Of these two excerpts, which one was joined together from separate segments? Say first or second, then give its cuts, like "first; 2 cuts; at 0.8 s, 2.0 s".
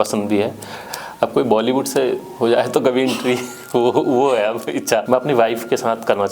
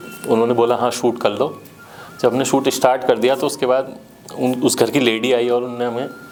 first; 2 cuts; at 0.9 s, 5.0 s